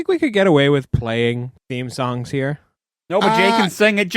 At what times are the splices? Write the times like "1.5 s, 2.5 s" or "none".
1.6 s